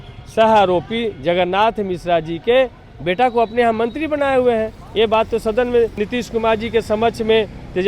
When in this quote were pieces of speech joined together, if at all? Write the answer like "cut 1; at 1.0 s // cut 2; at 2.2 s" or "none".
cut 1; at 6.0 s